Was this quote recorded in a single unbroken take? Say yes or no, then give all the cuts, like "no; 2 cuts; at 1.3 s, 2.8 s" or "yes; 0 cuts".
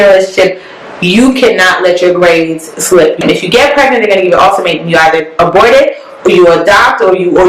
no; 1 cut; at 3.2 s